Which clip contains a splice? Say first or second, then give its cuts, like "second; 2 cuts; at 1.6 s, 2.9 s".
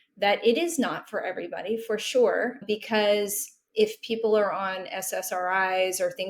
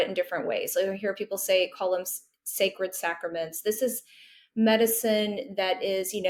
first; 1 cut; at 2.6 s